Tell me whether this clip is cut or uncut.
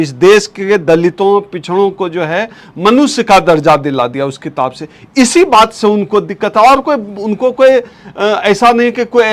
uncut